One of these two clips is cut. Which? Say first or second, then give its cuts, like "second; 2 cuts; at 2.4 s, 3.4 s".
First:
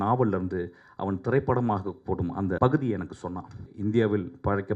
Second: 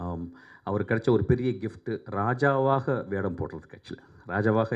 first; 2 cuts; at 2.6 s, 3.7 s